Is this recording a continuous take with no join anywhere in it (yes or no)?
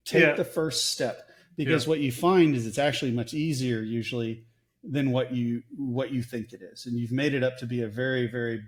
yes